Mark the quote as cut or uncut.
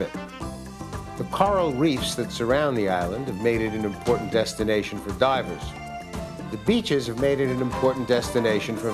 uncut